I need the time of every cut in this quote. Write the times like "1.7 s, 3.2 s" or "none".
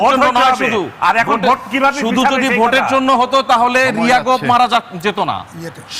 none